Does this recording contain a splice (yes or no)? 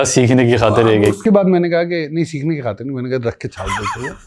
no